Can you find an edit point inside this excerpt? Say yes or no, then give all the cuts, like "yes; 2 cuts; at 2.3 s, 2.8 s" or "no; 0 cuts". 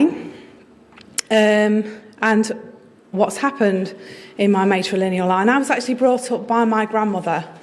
no; 0 cuts